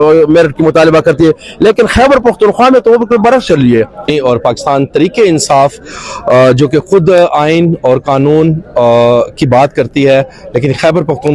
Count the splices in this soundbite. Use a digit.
1